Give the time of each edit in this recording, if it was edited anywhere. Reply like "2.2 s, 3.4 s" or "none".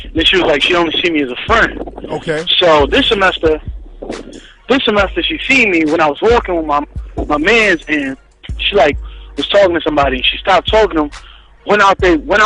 10.9 s